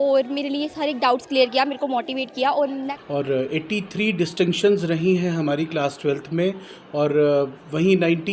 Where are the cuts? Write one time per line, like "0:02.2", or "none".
0:03.0